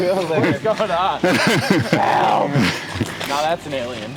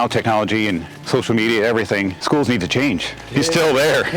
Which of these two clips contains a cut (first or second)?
second